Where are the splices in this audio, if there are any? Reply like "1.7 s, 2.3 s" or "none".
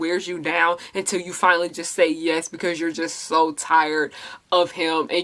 none